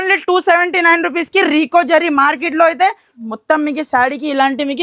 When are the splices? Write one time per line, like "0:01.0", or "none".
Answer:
0:03.1